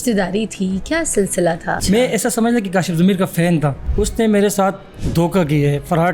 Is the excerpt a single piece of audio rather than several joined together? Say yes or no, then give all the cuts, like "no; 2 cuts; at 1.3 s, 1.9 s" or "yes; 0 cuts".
no; 3 cuts; at 1.8 s, 3.8 s, 4.9 s